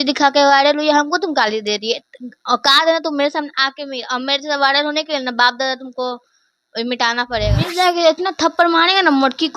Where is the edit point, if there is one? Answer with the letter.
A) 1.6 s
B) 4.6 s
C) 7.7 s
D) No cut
C